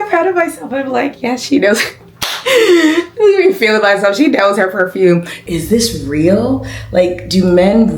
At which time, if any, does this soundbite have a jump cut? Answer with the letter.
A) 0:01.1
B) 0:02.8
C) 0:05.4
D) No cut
C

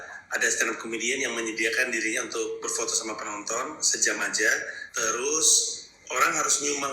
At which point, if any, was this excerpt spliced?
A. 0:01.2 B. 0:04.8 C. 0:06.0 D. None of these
B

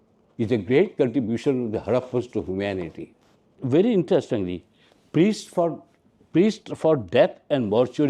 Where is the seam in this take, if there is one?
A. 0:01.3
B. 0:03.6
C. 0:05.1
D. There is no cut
B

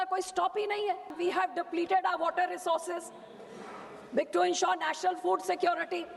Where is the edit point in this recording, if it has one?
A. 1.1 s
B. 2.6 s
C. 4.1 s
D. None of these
A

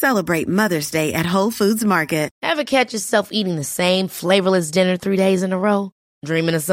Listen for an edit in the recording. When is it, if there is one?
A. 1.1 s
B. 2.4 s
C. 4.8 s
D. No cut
B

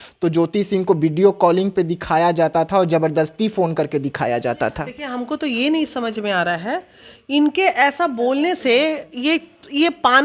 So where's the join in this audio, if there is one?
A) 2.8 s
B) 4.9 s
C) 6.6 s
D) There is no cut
D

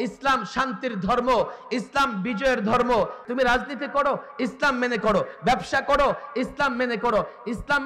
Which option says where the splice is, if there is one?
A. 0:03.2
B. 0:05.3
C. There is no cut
A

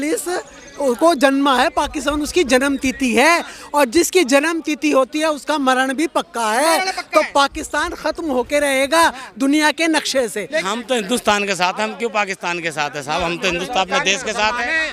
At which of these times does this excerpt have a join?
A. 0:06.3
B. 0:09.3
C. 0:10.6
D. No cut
C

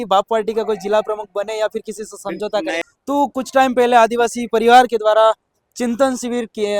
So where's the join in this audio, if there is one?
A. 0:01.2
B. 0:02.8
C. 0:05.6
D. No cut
B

